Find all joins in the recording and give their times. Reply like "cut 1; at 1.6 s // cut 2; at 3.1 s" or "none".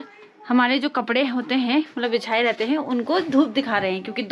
none